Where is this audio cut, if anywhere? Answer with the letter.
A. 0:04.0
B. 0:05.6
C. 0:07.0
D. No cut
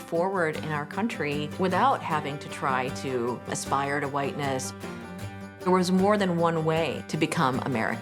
C